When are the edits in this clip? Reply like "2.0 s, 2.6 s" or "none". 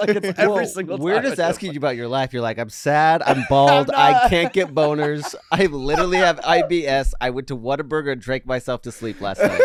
none

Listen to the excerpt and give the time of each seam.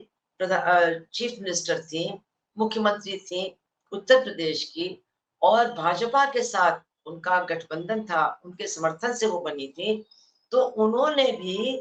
none

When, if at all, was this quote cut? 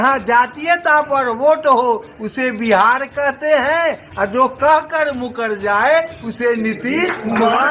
none

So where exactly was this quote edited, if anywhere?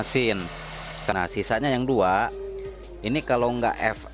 1.1 s

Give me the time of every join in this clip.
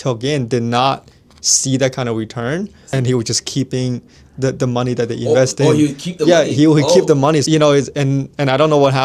2.8 s, 7.4 s

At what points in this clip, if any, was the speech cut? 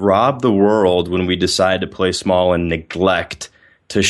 none

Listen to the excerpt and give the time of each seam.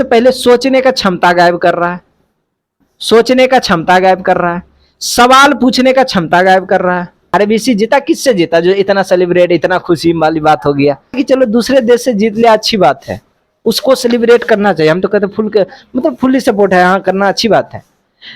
7.3 s, 11.2 s

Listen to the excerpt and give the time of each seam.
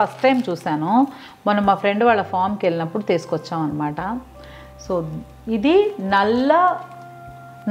none

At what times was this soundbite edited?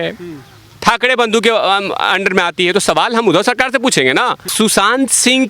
4.4 s

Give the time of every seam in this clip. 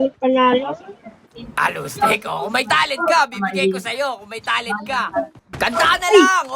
5.4 s

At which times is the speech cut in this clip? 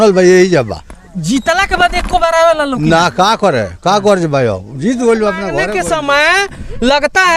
5.6 s

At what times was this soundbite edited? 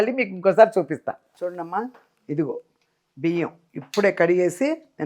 1.3 s

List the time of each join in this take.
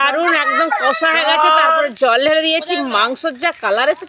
none

